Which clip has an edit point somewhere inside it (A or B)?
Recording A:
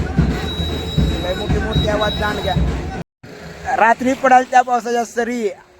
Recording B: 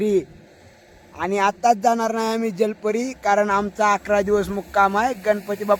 A